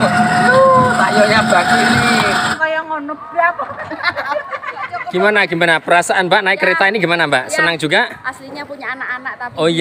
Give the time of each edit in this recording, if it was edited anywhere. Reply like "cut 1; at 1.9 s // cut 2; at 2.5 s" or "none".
cut 1; at 2.5 s